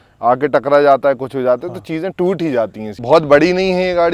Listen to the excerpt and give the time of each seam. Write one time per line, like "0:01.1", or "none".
0:02.9